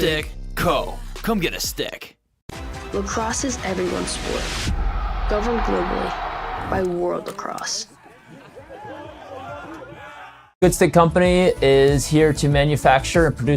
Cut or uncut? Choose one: cut